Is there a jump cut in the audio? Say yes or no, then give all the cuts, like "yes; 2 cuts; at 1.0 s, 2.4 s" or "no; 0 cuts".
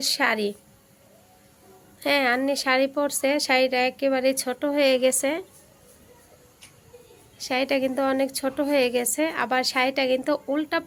no; 0 cuts